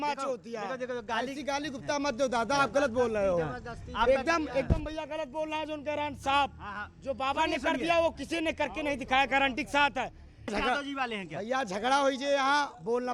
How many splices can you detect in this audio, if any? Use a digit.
1